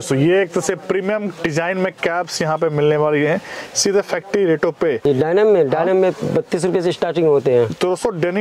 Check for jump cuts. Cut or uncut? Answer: cut